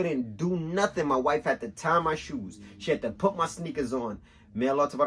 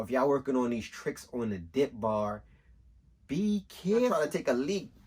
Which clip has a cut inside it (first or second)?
second